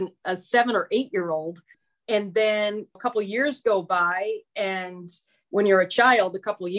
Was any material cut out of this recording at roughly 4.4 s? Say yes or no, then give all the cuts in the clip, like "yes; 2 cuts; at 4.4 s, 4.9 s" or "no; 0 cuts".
no; 2 cuts; at 1.7 s, 2.9 s